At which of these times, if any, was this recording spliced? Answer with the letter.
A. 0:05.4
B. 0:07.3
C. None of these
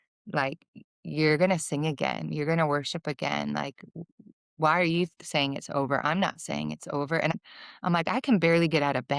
B